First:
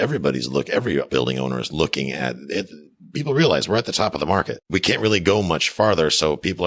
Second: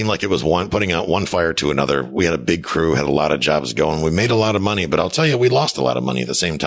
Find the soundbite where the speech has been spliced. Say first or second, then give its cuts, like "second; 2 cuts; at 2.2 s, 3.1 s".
first; 2 cuts; at 1.1 s, 4.5 s